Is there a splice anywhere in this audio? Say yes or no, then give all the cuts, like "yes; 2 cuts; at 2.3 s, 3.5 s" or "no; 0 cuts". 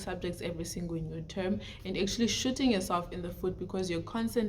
no; 0 cuts